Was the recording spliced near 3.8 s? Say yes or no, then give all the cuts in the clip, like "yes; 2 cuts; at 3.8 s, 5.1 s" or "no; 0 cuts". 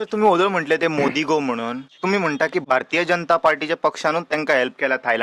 no; 2 cuts; at 1.9 s, 2.6 s